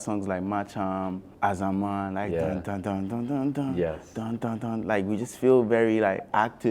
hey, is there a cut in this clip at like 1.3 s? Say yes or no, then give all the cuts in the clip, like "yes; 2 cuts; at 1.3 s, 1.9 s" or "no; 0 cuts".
yes; 1 cut; at 1.3 s